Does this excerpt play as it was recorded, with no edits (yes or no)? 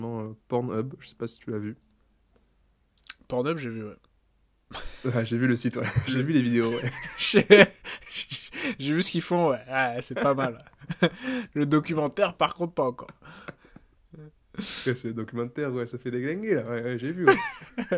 yes